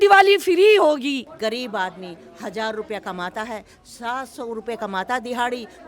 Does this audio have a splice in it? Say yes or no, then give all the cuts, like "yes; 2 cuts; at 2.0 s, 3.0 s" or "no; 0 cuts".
yes; 1 cut; at 1.3 s